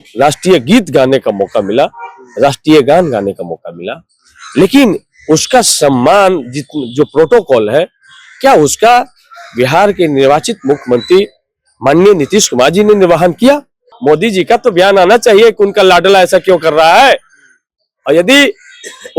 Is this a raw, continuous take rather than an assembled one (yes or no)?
no